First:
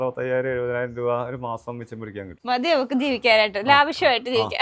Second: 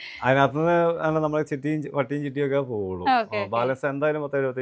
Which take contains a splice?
first; 1 cut; at 2.3 s

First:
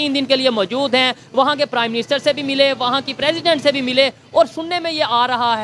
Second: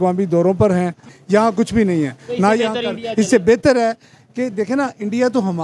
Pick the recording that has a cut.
second; 1 cut; at 1.1 s

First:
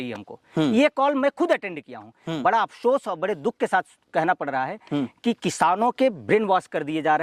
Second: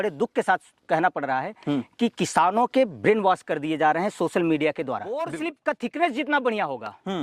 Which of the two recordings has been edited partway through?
second; 1 cut; at 5.3 s

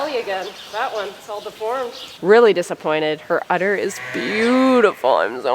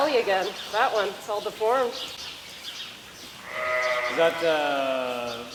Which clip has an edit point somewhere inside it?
first; 1 cut; at 2.2 s

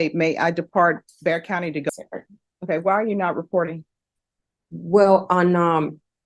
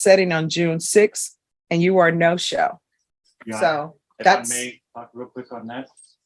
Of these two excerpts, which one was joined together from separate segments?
first; 1 cut; at 1.9 s

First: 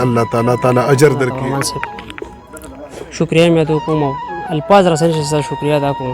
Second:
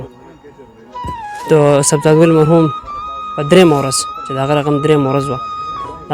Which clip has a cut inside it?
first; 1 cut; at 1.4 s

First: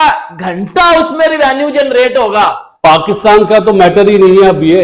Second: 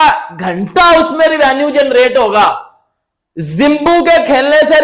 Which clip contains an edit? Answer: first; 1 cut; at 2.7 s

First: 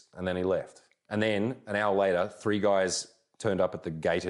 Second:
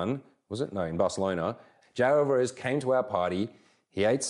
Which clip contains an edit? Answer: second; 1 cut; at 1.7 s

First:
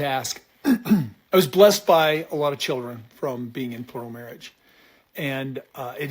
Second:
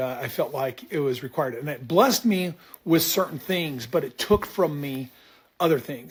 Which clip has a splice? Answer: first; 1 cut; at 1.2 s

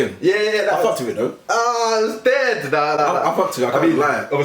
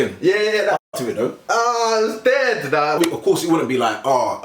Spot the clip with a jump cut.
second; 1 cut; at 3.0 s

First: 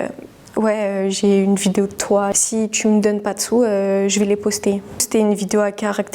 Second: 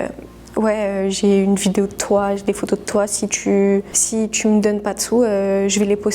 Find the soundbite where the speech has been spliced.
first; 2 cuts; at 2.4 s, 5.0 s

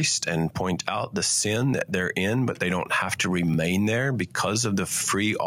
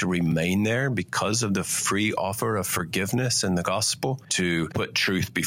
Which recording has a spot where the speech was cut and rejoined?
second; 1 cut; at 4.6 s

